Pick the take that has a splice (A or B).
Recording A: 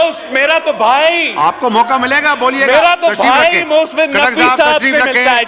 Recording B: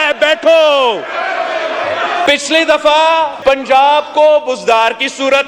B